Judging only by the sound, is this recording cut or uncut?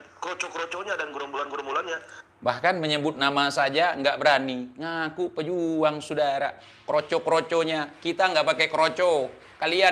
uncut